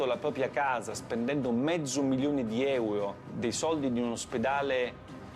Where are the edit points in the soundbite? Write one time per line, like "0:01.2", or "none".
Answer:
0:03.2